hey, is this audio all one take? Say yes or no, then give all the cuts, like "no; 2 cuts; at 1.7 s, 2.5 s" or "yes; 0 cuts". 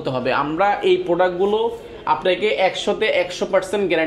yes; 0 cuts